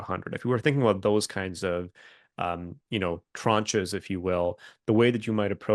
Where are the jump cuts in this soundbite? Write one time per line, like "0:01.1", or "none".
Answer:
none